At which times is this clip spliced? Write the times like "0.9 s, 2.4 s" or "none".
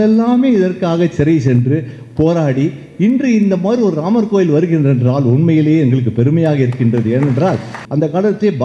7.7 s